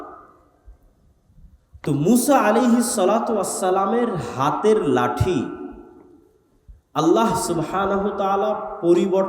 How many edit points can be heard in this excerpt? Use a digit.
1